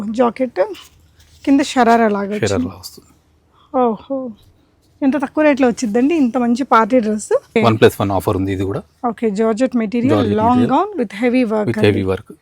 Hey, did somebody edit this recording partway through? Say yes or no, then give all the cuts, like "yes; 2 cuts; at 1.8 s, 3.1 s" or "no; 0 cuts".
yes; 1 cut; at 7.5 s